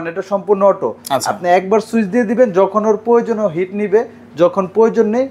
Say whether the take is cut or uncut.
uncut